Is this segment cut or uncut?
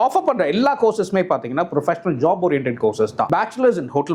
cut